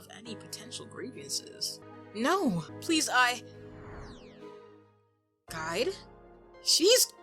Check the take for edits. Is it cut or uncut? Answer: cut